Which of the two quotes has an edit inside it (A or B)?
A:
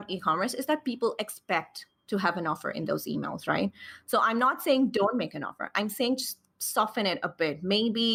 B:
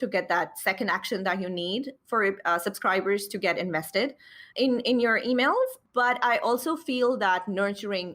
B